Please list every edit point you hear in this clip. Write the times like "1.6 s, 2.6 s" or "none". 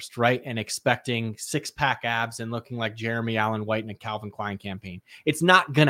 none